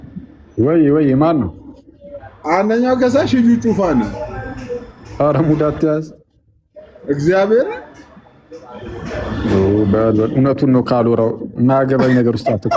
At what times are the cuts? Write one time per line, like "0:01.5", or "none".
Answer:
none